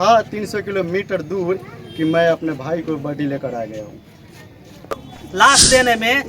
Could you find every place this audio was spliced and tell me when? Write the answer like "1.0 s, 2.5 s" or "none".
5.0 s